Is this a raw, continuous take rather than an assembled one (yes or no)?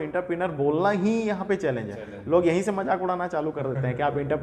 yes